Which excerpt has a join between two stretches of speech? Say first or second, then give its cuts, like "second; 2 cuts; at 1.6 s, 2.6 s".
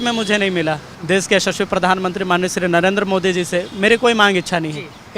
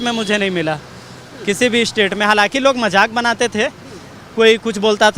first; 1 cut; at 0.9 s